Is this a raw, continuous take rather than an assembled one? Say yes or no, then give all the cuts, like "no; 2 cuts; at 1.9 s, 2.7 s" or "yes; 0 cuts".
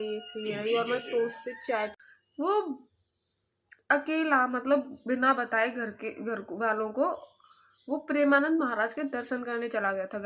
no; 1 cut; at 2.0 s